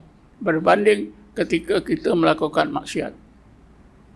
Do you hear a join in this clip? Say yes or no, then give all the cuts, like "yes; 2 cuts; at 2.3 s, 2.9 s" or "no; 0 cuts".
no; 0 cuts